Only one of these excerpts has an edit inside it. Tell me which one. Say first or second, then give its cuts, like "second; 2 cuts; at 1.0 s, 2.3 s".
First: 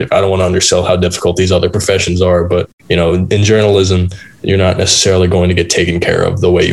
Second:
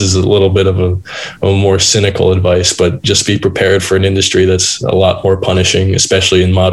first; 1 cut; at 2.8 s